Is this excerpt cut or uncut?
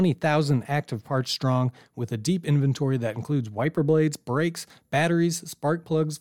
uncut